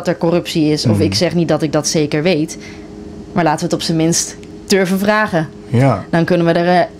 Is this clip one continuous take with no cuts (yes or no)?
yes